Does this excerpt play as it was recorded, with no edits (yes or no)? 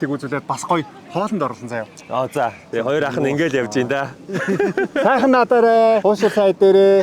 no